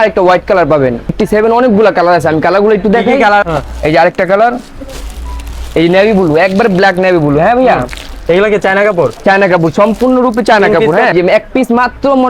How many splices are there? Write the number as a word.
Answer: three